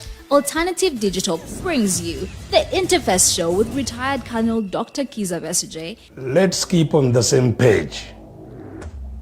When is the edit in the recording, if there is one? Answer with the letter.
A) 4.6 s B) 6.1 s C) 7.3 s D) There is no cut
D